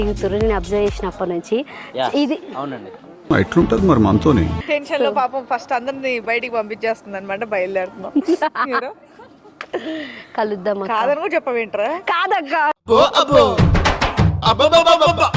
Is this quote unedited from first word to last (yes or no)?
no